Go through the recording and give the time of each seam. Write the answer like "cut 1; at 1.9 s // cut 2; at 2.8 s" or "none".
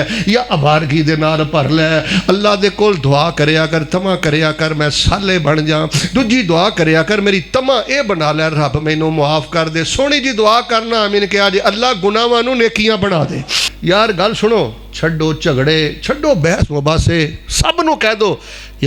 cut 1; at 13.7 s